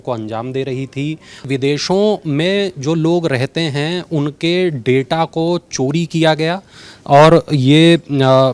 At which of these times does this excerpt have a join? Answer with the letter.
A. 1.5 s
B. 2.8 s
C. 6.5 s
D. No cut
A